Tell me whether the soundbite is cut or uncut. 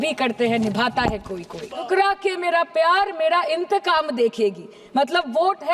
cut